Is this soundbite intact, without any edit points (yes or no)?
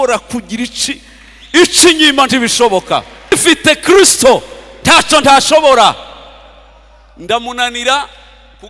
no